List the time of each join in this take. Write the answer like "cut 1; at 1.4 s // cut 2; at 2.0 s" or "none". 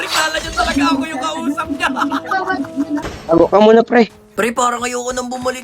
cut 1; at 3.0 s // cut 2; at 4.2 s